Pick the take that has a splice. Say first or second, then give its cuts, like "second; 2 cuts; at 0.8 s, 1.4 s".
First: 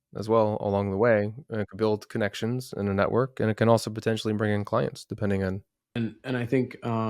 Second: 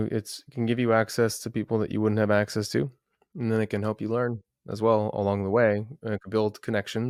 first; 1 cut; at 5.8 s